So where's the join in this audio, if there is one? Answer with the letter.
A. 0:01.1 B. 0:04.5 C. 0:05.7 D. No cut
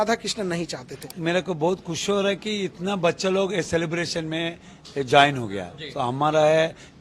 A